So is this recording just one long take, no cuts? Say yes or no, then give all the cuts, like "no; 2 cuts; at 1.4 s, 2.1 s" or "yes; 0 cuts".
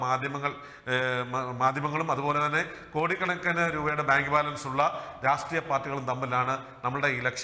yes; 0 cuts